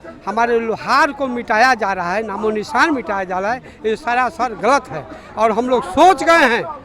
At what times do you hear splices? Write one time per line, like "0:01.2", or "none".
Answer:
none